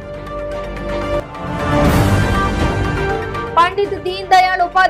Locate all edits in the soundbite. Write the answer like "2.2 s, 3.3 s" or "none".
0.9 s